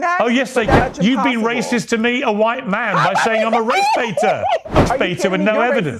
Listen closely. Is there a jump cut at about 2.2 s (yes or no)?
no